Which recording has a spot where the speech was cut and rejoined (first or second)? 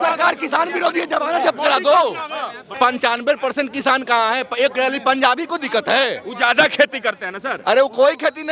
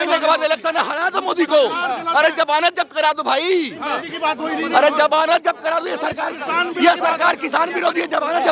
first